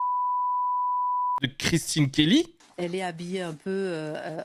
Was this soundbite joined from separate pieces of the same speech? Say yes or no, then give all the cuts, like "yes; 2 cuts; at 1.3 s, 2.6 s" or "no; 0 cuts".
yes; 2 cuts; at 1.4 s, 2.6 s